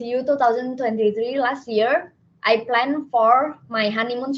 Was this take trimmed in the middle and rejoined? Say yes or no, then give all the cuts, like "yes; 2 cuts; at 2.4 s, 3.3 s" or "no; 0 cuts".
no; 0 cuts